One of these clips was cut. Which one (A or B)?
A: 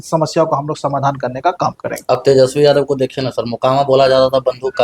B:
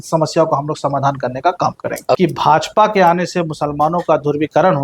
B